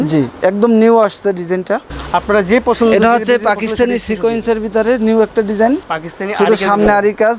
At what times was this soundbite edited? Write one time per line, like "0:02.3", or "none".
0:01.9
0:05.9

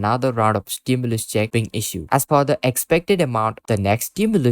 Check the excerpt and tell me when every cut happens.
0:02.0
0:03.6

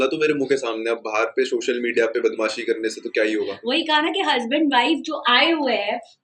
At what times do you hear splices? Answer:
0:03.6

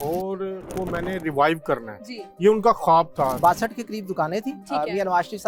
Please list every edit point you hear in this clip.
0:03.4

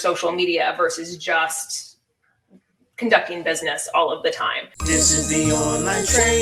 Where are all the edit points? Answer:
0:04.7

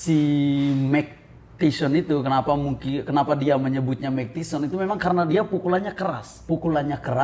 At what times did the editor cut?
0:06.3

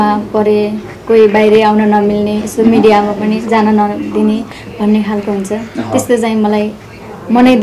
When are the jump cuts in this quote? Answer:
none

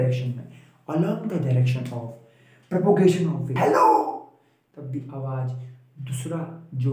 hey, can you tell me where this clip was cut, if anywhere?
0:03.4

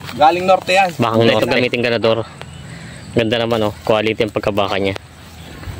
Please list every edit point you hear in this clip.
0:01.4

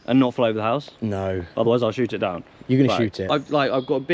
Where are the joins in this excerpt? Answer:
0:03.2

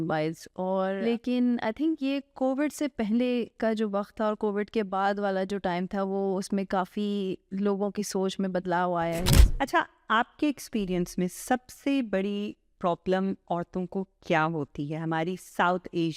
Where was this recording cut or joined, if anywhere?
0:01.0
0:09.4

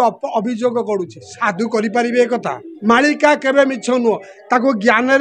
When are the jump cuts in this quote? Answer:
0:02.7

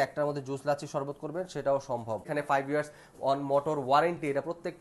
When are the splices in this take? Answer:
0:02.3

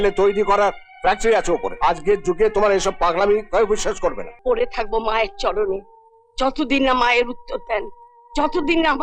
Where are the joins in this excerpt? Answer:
0:01.7
0:04.3

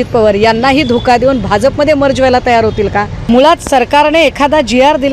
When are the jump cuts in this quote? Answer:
0:03.2

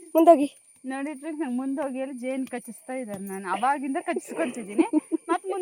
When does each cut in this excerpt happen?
none

